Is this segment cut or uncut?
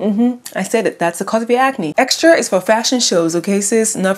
cut